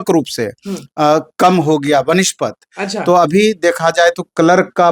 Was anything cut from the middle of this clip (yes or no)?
no